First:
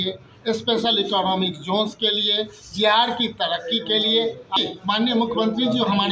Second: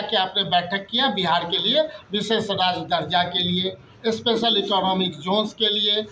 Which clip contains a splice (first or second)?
first